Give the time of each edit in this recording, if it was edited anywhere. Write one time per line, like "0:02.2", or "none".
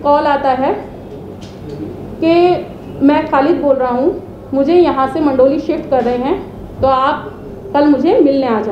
none